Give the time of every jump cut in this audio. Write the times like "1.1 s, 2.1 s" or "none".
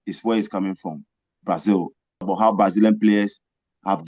2.3 s

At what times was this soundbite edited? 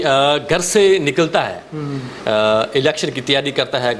none

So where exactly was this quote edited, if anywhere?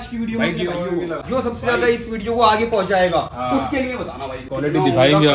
1.2 s, 4.5 s

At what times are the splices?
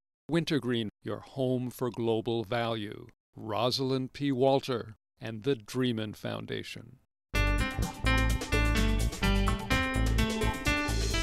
7.2 s

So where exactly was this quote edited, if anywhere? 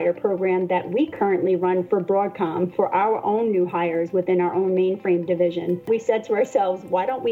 5.8 s

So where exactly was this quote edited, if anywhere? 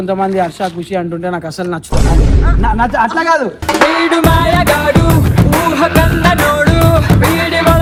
none

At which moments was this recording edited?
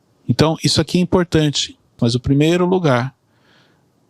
2.0 s

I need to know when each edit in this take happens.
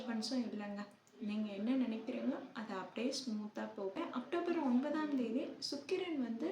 4.0 s

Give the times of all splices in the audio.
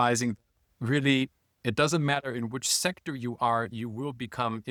none

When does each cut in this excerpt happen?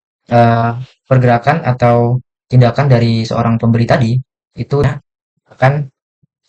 4.9 s

